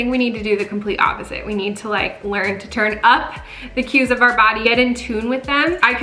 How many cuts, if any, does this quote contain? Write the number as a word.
zero